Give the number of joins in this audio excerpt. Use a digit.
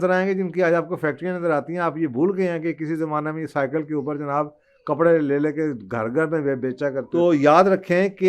1